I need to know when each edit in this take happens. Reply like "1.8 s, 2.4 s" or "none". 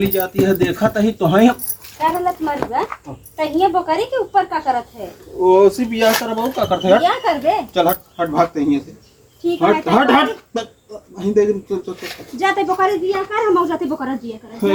none